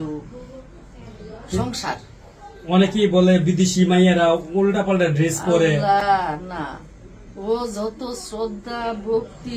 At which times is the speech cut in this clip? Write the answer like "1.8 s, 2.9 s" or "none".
none